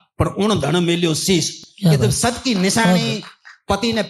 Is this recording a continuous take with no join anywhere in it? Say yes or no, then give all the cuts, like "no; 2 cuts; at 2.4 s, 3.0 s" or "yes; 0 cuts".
yes; 0 cuts